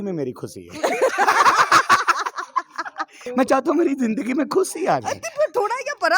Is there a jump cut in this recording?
yes; 1 cut; at 3.2 s

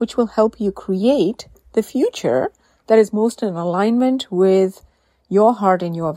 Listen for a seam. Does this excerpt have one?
no; 0 cuts

